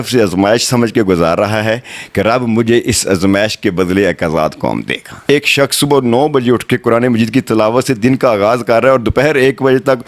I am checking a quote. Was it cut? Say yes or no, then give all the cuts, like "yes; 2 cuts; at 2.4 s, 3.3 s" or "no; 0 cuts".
yes; 1 cut; at 5.2 s